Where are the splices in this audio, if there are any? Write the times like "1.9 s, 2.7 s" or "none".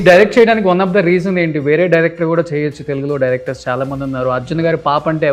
none